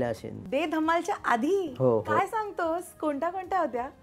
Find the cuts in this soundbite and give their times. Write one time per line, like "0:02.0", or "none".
none